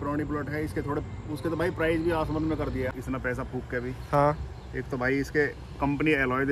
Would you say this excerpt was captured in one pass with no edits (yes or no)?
no